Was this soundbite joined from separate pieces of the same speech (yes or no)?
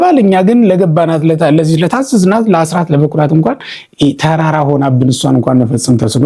no